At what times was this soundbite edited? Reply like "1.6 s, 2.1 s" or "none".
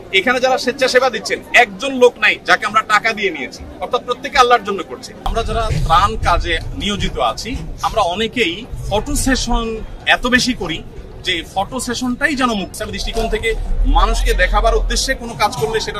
5.1 s, 8.8 s, 12.8 s